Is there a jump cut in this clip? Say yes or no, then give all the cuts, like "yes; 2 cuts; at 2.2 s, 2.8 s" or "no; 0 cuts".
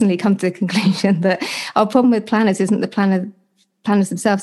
no; 0 cuts